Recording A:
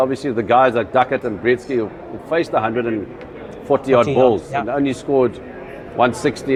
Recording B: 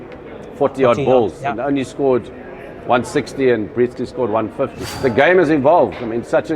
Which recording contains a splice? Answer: B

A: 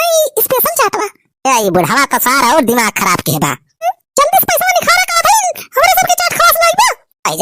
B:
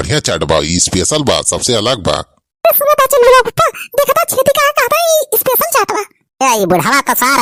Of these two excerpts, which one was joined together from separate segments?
A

